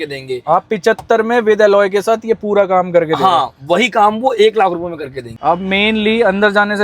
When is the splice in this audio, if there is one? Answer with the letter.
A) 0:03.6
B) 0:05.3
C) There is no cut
B